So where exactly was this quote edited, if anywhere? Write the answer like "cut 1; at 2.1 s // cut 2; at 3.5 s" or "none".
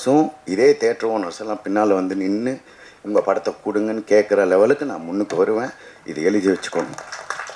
none